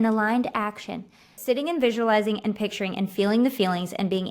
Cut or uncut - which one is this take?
cut